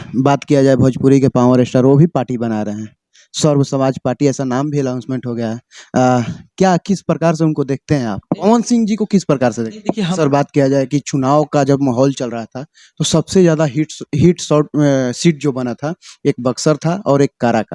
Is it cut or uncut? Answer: cut